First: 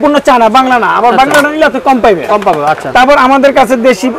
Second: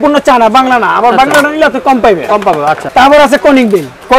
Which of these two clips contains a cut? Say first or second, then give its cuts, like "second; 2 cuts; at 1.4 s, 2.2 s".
second; 1 cut; at 2.8 s